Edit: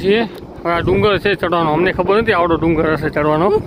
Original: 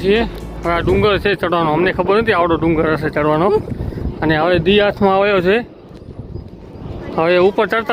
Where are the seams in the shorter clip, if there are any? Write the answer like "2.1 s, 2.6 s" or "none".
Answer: none